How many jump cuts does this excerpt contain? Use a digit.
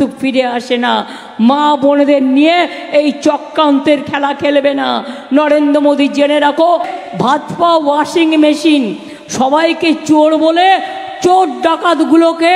1